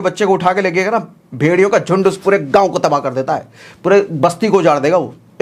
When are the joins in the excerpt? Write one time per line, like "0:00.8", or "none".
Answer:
none